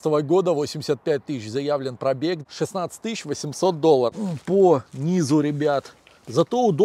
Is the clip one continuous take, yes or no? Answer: no